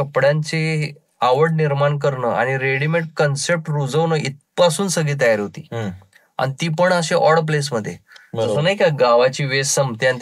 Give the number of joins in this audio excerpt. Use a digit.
0